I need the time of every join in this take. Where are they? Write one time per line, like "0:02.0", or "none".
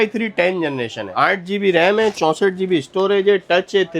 none